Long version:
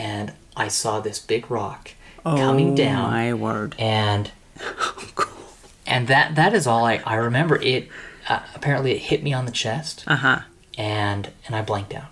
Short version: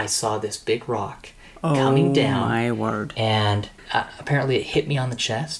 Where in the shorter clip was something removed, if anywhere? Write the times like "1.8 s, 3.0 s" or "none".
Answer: 3.7 s